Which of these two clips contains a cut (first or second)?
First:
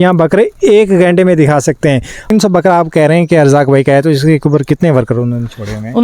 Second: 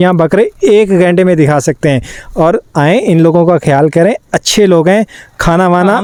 first